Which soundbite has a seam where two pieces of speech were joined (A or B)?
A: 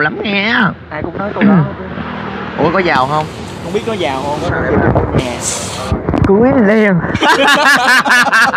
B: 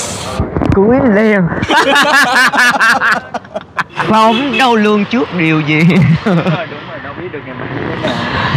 B